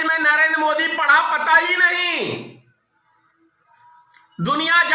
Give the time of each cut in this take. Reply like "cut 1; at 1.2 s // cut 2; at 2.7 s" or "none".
none